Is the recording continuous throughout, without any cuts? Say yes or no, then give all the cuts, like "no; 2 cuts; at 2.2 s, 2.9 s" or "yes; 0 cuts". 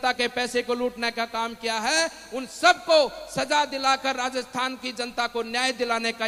yes; 0 cuts